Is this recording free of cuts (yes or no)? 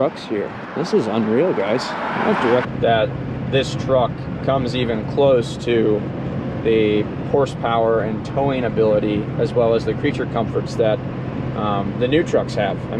no